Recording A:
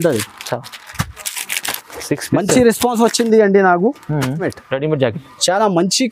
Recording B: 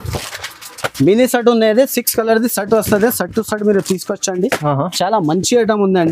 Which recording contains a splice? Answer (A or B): A